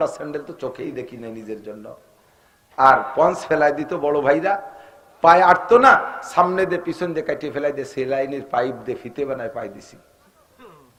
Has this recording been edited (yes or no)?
no